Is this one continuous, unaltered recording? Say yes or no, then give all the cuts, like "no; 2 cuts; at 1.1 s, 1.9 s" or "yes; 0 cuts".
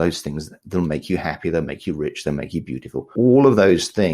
no; 1 cut; at 3.1 s